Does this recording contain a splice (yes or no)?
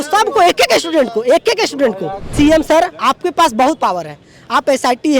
yes